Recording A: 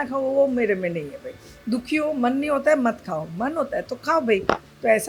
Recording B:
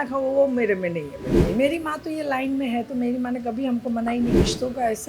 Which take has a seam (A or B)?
B